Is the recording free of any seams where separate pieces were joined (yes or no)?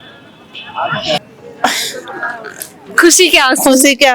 no